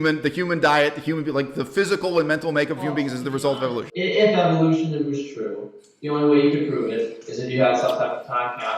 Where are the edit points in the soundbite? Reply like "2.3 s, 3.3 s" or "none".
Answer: 3.9 s